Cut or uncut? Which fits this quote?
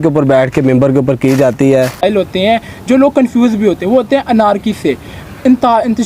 cut